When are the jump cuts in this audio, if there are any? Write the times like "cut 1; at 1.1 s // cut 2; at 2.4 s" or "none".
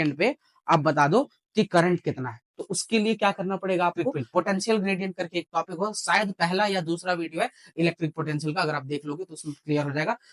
cut 1; at 4.1 s